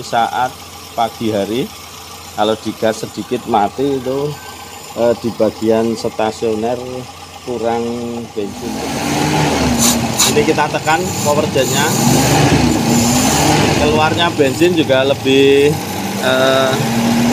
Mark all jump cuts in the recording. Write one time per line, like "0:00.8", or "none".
0:09.0